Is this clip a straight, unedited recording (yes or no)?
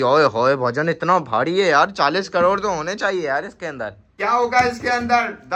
no